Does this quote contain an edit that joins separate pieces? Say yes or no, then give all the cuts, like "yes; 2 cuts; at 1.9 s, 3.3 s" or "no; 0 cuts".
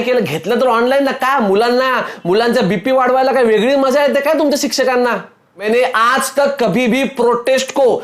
yes; 1 cut; at 5.6 s